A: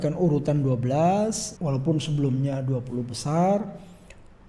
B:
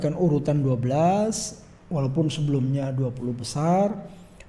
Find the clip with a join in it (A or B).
A